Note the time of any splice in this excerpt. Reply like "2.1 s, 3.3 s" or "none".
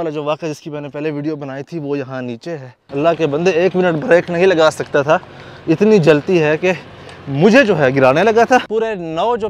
2.7 s, 8.7 s